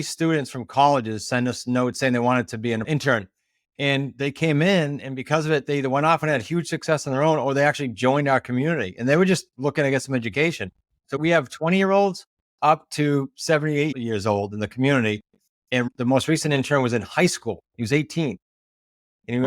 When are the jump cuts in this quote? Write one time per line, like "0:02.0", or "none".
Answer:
0:02.8
0:11.2
0:15.9